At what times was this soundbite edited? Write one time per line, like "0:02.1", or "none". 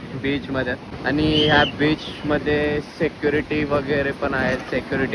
0:00.9